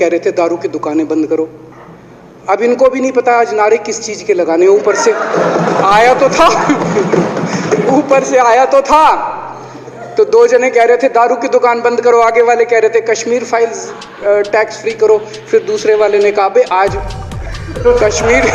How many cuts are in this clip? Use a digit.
0